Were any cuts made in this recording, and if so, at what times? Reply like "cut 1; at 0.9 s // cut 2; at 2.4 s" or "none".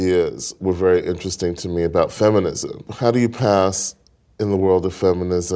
cut 1; at 2.9 s